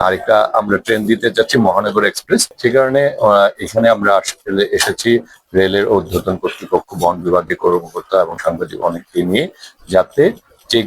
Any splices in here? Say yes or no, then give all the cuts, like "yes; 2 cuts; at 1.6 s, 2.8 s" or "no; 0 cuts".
yes; 1 cut; at 2.5 s